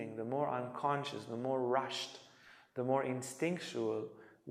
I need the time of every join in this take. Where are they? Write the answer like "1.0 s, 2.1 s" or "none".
none